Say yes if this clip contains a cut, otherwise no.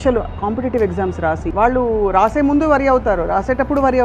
yes